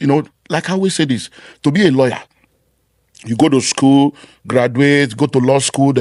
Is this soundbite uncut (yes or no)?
yes